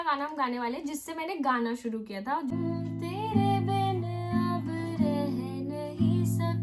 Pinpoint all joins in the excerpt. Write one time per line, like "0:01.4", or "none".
0:02.5